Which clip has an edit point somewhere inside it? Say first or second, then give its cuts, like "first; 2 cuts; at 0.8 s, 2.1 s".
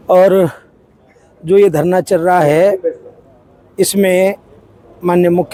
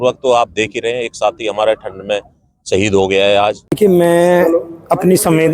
second; 1 cut; at 3.8 s